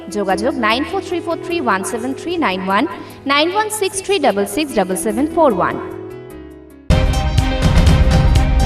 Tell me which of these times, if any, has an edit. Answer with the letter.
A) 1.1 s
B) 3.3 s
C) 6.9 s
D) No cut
C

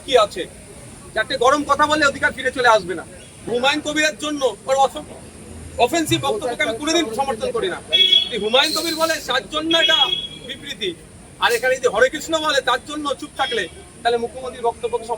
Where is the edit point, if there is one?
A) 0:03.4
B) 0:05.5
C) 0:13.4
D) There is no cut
A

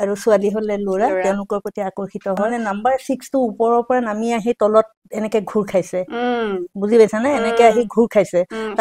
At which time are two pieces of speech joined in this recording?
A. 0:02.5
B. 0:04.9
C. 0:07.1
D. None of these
A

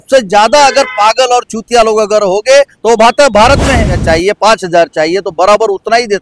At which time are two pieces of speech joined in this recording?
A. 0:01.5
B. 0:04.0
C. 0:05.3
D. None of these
B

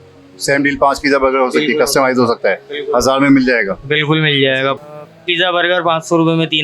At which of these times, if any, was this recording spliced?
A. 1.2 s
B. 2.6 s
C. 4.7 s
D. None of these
C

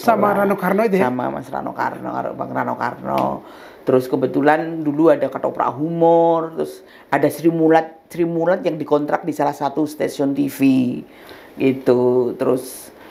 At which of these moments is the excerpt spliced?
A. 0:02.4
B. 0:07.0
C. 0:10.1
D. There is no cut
D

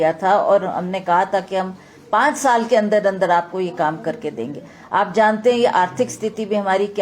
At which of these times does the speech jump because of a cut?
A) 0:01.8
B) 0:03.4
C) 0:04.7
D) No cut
D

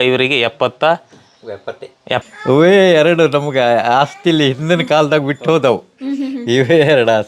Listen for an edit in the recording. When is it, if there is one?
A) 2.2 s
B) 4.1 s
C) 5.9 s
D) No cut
A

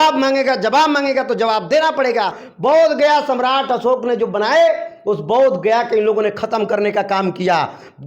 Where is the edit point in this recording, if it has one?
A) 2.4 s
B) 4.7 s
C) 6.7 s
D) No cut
A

